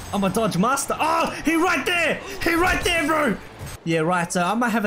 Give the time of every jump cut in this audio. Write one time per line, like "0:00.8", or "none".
0:03.7